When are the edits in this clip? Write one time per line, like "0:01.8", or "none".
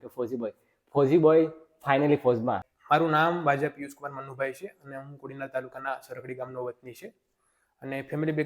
0:02.7